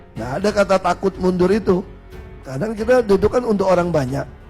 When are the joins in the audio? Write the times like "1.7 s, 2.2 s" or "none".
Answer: none